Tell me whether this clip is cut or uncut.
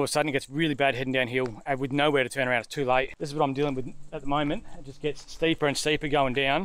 cut